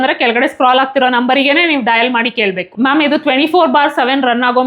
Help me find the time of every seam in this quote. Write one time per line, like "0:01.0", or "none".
0:02.7